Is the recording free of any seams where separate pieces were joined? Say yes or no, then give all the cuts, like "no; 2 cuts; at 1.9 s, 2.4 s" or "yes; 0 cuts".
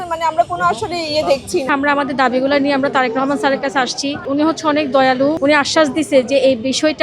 no; 3 cuts; at 1.7 s, 4.2 s, 5.4 s